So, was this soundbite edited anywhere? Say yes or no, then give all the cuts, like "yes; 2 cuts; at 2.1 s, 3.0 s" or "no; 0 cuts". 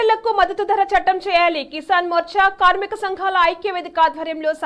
no; 0 cuts